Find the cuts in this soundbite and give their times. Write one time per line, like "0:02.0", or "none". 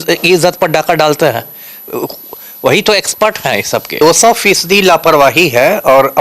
0:04.0